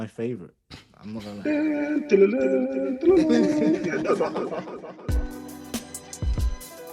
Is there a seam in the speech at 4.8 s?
yes; 1 cut; at 4.8 s

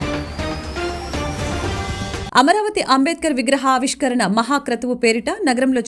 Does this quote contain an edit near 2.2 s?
no; 0 cuts

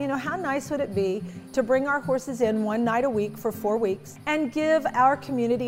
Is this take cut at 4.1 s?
yes; 2 cuts; at 1.4 s, 4.1 s

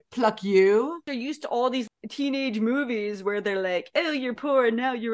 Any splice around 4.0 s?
no; 1 cut; at 1.1 s

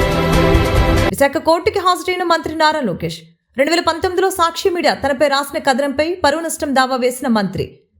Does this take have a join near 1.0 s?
yes; 1 cut; at 1.0 s

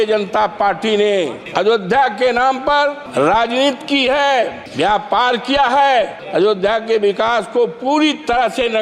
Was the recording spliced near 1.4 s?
yes; 4 cuts; at 1.4 s, 3.0 s, 4.6 s, 6.2 s

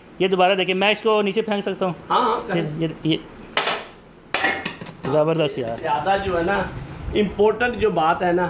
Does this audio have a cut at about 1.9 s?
no; 1 cut; at 5.7 s

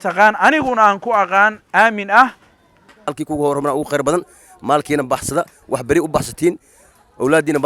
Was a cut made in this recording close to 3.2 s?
yes; 1 cut; at 3.2 s

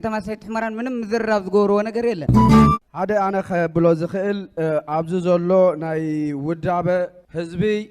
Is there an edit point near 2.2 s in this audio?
yes; 1 cut; at 2.2 s

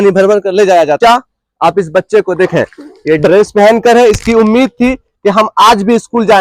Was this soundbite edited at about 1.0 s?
yes; 1 cut; at 1.0 s

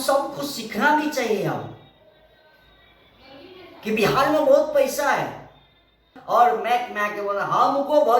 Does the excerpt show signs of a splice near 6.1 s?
yes; 1 cut; at 6.1 s

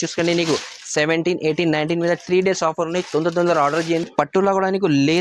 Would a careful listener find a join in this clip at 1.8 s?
no; 1 cut; at 4.0 s

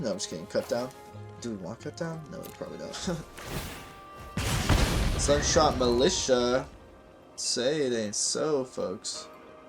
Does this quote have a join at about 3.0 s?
yes; 1 cut; at 3.0 s

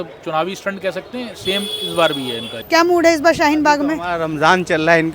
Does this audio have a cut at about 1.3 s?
no; 1 cut; at 2.5 s

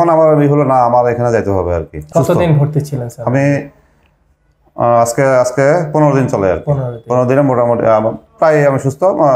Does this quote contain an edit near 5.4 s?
no; 1 cut; at 2.0 s

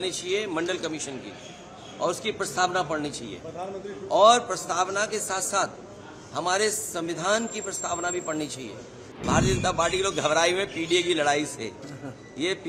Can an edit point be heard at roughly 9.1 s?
yes; 1 cut; at 9.1 s

